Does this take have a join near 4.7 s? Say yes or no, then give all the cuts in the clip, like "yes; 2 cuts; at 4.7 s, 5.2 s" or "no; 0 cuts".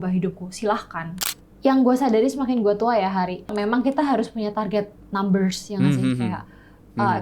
no; 2 cuts; at 1.2 s, 3.5 s